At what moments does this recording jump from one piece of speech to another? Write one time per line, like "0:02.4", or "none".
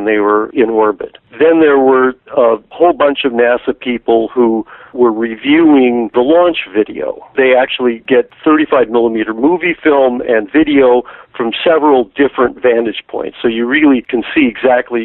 none